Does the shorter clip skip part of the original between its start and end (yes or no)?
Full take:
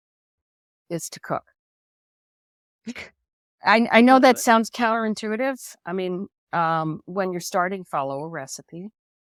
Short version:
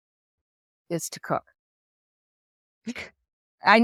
no